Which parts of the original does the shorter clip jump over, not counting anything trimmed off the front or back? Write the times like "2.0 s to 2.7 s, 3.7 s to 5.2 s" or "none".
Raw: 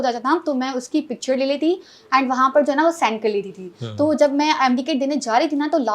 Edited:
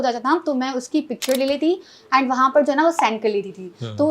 none